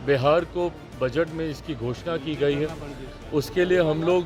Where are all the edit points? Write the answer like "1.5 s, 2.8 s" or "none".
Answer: none